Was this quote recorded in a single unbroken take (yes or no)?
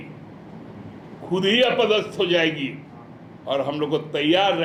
yes